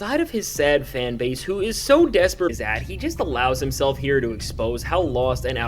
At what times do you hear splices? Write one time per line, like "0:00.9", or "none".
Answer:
0:02.5